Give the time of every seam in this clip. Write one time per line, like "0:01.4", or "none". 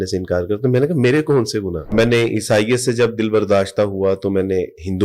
0:01.9